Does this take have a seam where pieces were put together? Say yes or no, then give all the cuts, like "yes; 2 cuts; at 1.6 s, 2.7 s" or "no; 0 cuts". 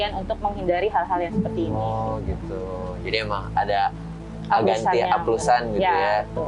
no; 0 cuts